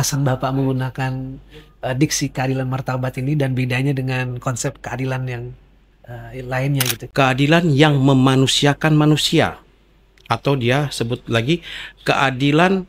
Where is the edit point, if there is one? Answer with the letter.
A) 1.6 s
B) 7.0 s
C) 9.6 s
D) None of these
B